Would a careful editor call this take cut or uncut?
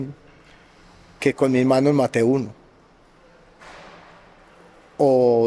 uncut